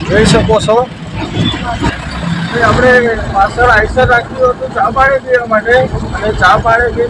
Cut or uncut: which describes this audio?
cut